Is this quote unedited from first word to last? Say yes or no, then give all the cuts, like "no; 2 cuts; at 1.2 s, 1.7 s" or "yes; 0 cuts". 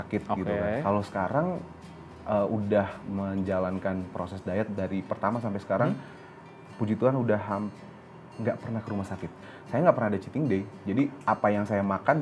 no; 1 cut; at 9.5 s